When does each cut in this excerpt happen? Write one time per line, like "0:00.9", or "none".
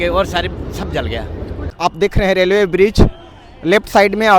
0:01.7